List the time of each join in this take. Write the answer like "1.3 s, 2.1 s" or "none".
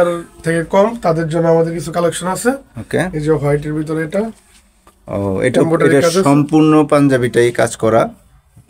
none